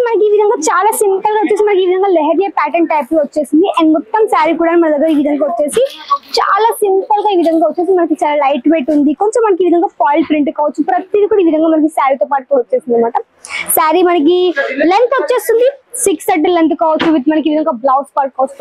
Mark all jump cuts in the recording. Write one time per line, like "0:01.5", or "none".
none